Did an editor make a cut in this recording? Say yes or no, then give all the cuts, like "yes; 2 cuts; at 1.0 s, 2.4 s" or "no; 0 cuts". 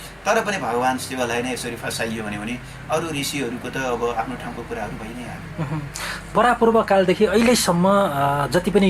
no; 0 cuts